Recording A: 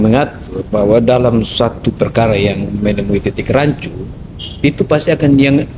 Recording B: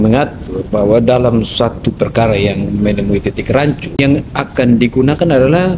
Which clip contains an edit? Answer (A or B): B